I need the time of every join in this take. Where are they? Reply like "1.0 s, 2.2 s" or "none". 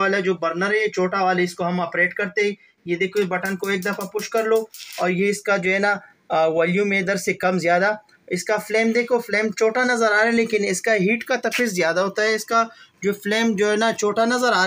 none

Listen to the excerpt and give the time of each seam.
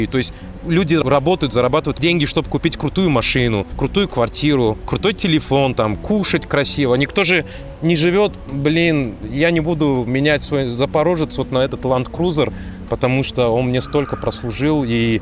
1.0 s, 1.9 s, 3.7 s, 4.9 s

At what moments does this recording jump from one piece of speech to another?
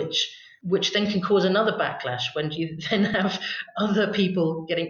none

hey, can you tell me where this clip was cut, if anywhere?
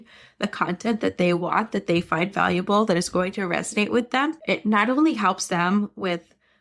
4.4 s

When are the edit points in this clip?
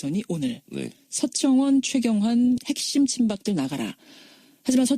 2.5 s

